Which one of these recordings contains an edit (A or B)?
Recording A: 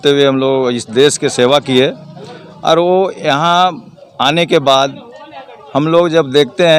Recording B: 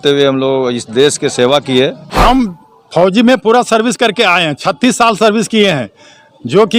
B